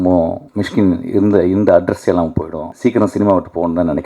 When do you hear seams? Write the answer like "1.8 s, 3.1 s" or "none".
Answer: 2.7 s